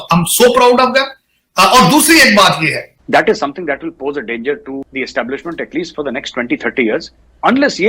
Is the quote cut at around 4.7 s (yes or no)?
no